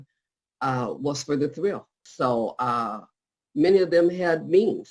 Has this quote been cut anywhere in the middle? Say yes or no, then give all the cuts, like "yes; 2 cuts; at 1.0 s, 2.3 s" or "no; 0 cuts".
yes; 1 cut; at 1.9 s